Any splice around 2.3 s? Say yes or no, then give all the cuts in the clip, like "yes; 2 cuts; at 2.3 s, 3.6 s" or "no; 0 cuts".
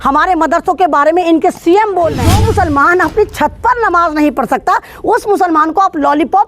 yes; 1 cut; at 2.3 s